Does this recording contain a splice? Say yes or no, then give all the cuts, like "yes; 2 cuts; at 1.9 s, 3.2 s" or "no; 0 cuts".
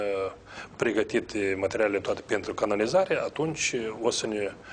no; 0 cuts